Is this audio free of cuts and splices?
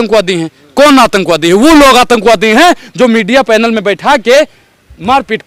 yes; 0 cuts

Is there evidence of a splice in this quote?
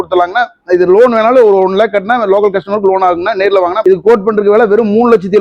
yes; 1 cut; at 3.8 s

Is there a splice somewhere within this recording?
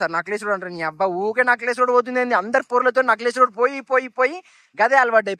no; 0 cuts

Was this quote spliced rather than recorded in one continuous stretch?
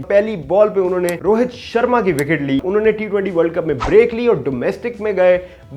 yes; 2 cuts; at 1.2 s, 2.6 s

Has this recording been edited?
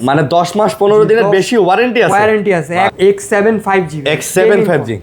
yes; 1 cut; at 2.9 s

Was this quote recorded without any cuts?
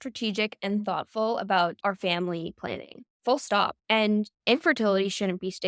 no; 2 cuts; at 1.8 s, 3.7 s

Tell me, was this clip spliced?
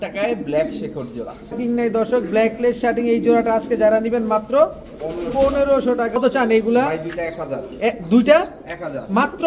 yes; 2 cuts; at 1.6 s, 6.2 s

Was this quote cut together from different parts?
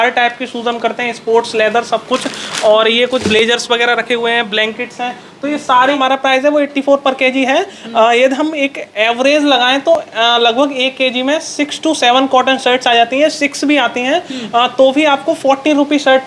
yes; 1 cut; at 6.0 s

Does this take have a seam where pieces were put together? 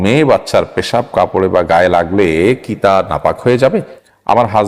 yes; 1 cut; at 3.7 s

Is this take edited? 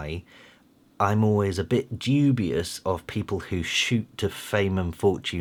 no; 0 cuts

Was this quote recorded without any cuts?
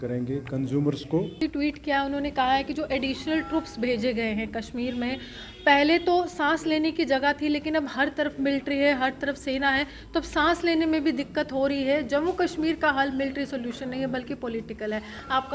no; 1 cut; at 1.3 s

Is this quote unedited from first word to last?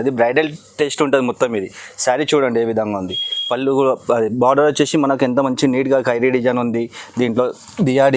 yes; 0 cuts

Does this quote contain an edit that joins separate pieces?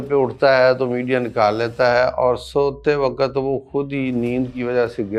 no; 0 cuts

